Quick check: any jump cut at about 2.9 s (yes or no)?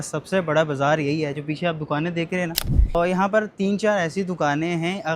yes